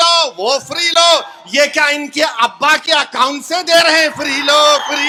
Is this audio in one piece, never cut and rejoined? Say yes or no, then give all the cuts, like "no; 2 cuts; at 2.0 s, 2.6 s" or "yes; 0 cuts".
yes; 0 cuts